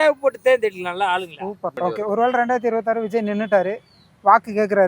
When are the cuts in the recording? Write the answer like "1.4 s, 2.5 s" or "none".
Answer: 1.8 s